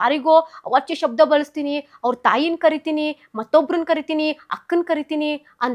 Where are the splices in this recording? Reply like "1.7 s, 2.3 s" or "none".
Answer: none